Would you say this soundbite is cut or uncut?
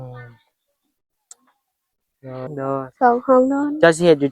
cut